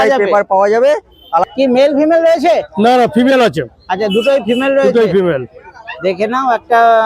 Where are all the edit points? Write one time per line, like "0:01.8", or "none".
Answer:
0:01.4